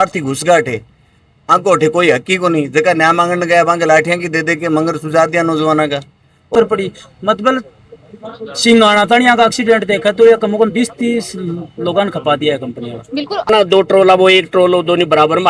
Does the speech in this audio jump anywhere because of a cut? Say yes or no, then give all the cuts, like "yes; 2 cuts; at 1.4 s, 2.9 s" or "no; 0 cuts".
yes; 2 cuts; at 6.5 s, 13.5 s